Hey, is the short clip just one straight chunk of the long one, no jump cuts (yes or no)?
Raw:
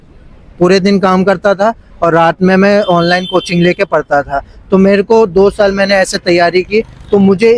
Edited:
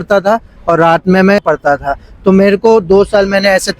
no